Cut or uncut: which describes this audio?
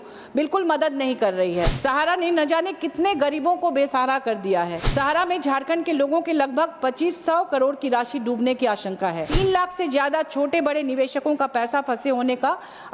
cut